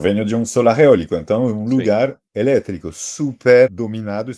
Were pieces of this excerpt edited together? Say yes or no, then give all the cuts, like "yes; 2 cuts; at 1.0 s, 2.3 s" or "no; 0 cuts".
yes; 2 cuts; at 2.2 s, 3.7 s